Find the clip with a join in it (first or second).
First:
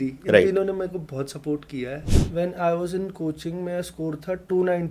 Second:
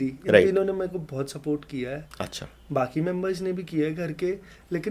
first